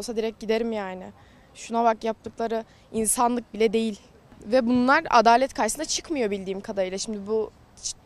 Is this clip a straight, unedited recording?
yes; 0 cuts

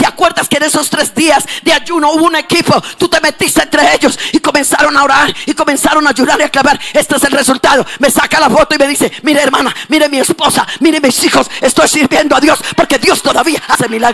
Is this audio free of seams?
yes; 0 cuts

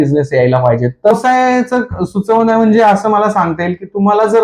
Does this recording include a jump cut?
yes; 1 cut; at 1.1 s

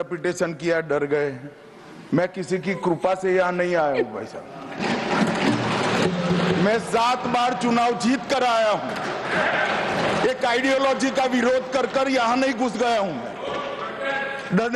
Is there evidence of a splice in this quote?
no; 0 cuts

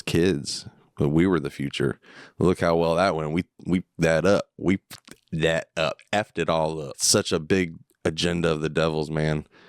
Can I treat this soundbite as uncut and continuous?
no; 1 cut; at 6.9 s

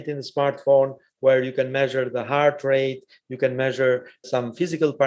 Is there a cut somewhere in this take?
no; 0 cuts

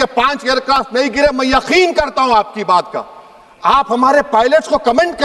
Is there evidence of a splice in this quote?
no; 0 cuts

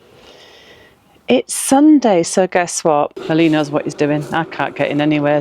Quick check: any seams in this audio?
yes; 1 cut; at 3.2 s

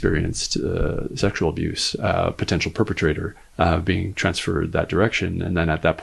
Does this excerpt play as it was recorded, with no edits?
no; 1 cut; at 3.4 s

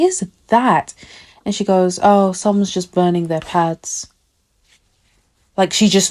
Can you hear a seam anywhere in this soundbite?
no; 0 cuts

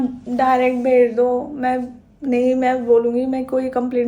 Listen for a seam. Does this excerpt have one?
no; 0 cuts

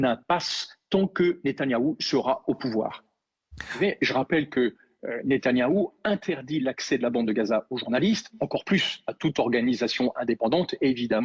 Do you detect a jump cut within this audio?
yes; 1 cut; at 6.2 s

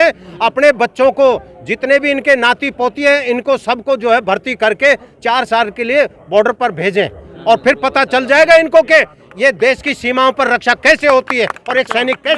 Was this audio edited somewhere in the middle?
no; 0 cuts

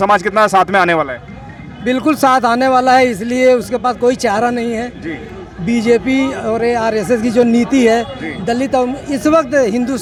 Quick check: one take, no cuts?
yes; 0 cuts

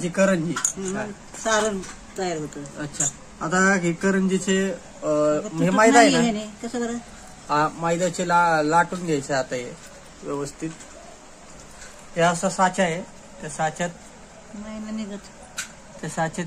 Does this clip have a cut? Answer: no; 0 cuts

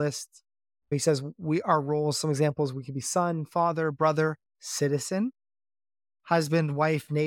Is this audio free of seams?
no; 1 cut; at 0.9 s

